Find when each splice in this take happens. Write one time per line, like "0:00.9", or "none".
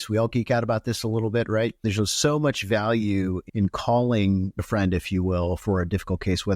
0:01.8
0:03.4
0:04.6
0:05.6